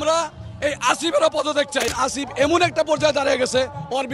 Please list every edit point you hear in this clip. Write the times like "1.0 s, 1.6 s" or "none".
1.9 s